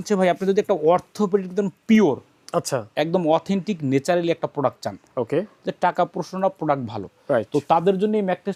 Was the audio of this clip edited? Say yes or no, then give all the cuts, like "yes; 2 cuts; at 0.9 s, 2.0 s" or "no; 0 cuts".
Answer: no; 0 cuts